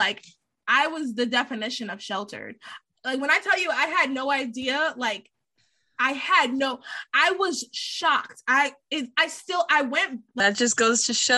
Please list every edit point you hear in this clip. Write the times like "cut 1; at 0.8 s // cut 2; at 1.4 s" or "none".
cut 1; at 10.2 s